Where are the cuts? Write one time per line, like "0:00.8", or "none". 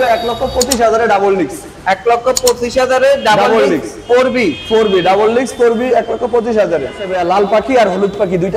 0:07.1